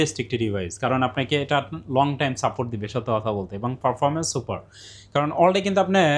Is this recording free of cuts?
yes; 0 cuts

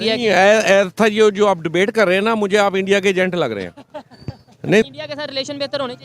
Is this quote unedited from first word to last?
no; 1 cut; at 4.9 s

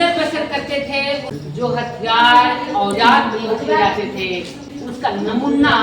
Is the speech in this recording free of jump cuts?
no; 2 cuts; at 1.3 s, 4.6 s

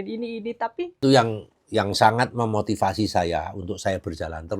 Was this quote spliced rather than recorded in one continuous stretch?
yes; 1 cut; at 1.0 s

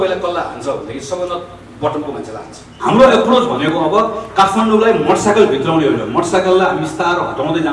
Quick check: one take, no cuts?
no; 1 cut; at 2.7 s

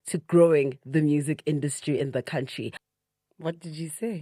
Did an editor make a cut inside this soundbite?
yes; 1 cut; at 2.8 s

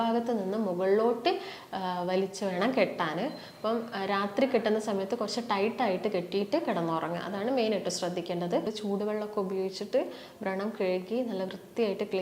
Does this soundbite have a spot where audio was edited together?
yes; 1 cut; at 8.7 s

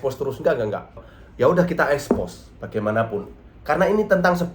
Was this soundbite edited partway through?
yes; 1 cut; at 1.2 s

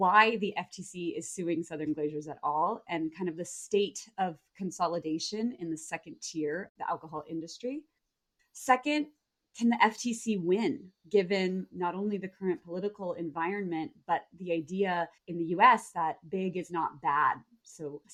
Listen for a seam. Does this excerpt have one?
no; 0 cuts

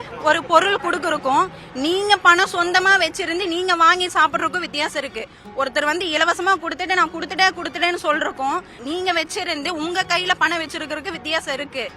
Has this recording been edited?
yes; 1 cut; at 8.8 s

